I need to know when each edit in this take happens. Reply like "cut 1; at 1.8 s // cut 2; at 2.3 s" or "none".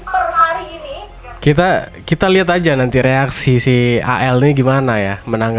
none